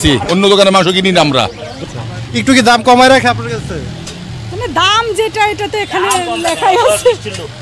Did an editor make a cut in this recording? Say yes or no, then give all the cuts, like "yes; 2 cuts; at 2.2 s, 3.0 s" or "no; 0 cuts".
yes; 1 cut; at 1.7 s